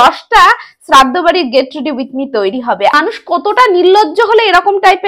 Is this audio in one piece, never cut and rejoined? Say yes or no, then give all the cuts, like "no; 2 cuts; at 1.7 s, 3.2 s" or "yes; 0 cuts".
no; 1 cut; at 2.9 s